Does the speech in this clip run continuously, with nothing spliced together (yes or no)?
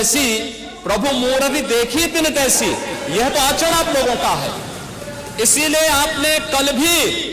yes